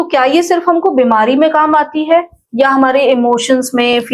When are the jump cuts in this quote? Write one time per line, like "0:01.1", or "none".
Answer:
none